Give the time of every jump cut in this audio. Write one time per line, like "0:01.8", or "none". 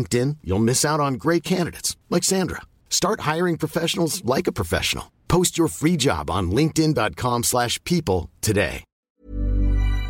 0:08.9